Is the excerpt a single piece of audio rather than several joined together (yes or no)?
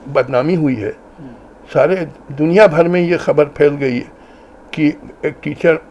yes